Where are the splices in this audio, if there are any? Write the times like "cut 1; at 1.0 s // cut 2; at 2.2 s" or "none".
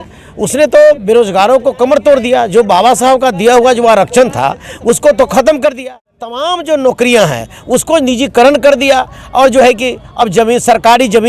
cut 1; at 6.2 s